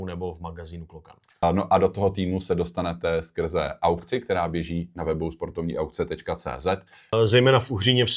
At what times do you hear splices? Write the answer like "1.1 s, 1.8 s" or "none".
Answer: 1.4 s, 7.1 s